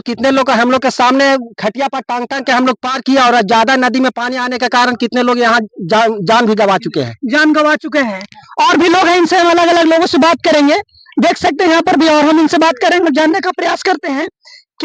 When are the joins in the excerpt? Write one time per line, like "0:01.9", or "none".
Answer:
none